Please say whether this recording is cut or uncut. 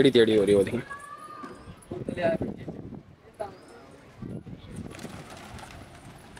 uncut